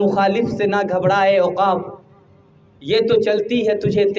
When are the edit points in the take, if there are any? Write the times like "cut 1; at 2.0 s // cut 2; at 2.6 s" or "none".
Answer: none